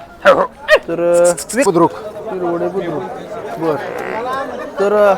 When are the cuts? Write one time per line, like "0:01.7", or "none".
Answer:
0:01.6

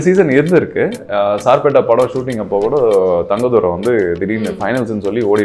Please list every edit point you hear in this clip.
none

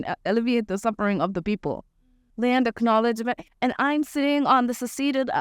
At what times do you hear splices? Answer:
0:02.2

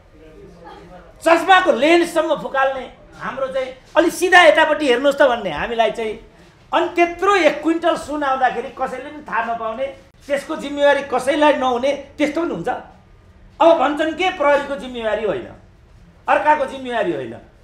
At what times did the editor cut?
none

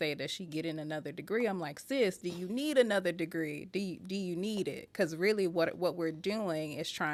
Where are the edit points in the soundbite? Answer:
none

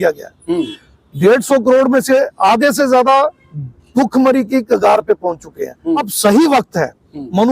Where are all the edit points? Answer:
0:06.1

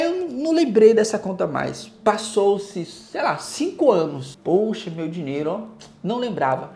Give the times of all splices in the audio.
0:04.3

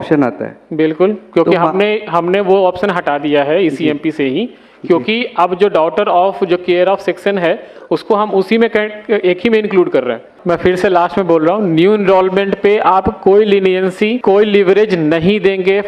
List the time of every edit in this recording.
0:10.3
0:14.2

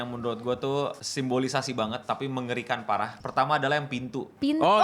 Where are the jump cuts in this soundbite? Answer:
0:01.0
0:03.2

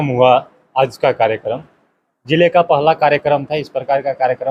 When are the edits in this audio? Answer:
none

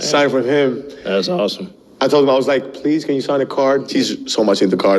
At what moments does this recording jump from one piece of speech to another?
0:03.9

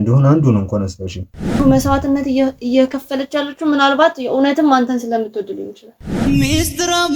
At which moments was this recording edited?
0:01.6
0:06.1

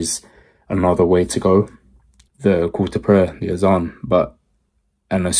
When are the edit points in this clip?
0:02.2

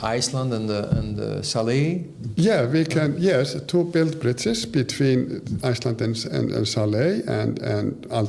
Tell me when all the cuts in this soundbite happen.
none

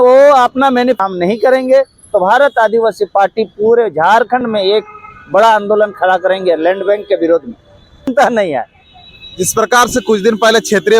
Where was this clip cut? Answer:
0:01.0
0:08.1

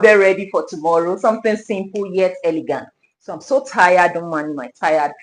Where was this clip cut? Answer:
none

